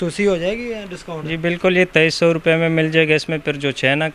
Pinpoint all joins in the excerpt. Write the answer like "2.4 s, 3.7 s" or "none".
none

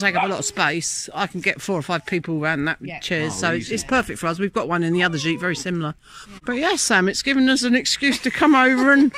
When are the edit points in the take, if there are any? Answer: none

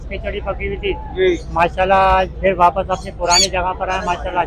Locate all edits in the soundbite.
none

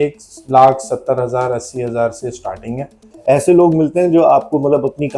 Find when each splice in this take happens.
3.0 s

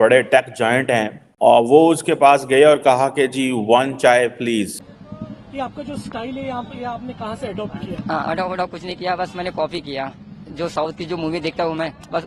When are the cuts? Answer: 1.6 s, 4.4 s

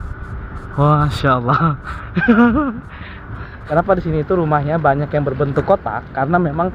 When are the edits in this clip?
none

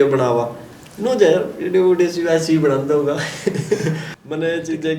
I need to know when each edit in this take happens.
4.0 s

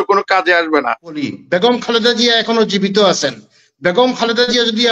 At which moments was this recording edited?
1.2 s

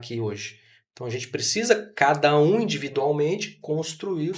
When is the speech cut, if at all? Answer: none

